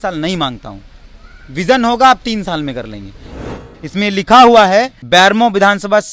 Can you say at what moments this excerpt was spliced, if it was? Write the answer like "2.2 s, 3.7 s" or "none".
3.3 s, 5.0 s